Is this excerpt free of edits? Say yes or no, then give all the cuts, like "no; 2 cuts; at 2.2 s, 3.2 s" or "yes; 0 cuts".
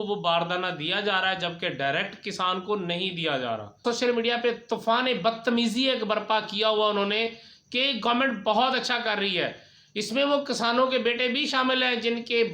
no; 1 cut; at 3.8 s